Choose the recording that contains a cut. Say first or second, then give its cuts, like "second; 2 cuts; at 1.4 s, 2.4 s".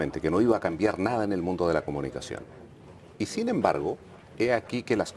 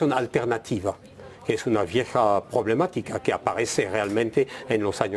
second; 1 cut; at 4.1 s